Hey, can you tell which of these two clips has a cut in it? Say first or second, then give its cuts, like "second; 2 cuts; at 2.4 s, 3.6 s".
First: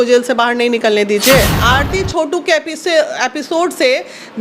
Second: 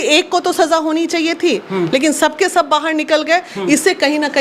first; 1 cut; at 1.5 s